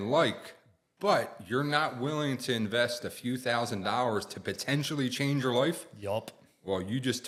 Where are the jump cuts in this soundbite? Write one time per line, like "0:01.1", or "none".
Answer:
none